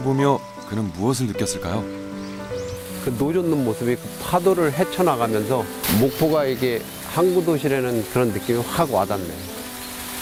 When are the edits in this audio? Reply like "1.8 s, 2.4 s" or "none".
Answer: none